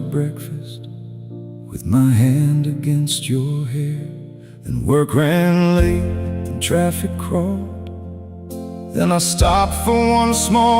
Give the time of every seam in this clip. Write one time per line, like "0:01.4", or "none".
0:06.6